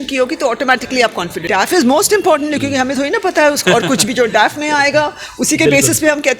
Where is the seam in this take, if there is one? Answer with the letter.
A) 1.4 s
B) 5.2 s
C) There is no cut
A